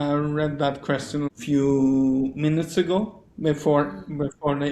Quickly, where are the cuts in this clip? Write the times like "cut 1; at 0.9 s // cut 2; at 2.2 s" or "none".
cut 1; at 1.3 s

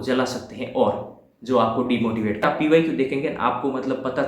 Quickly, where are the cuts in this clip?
cut 1; at 2.4 s

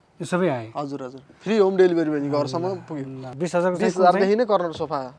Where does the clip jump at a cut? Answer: cut 1; at 3.2 s

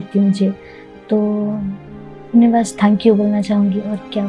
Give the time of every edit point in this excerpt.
none

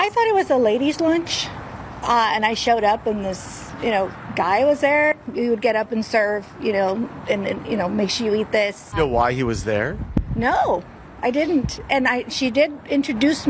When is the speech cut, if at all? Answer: cut 1; at 5.1 s

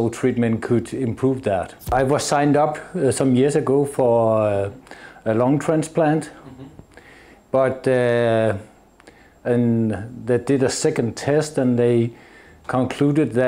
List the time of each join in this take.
cut 1; at 1.9 s

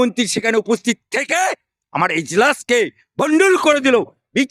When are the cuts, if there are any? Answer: none

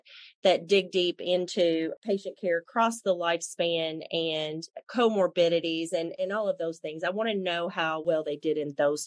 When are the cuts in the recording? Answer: cut 1; at 1.9 s // cut 2; at 6.1 s // cut 3; at 8.0 s

